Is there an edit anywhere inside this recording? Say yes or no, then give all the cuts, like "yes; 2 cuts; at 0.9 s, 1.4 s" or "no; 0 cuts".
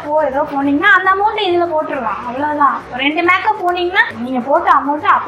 yes; 1 cut; at 4.2 s